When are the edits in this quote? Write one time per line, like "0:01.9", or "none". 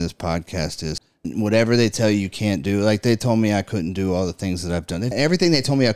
0:01.3
0:05.1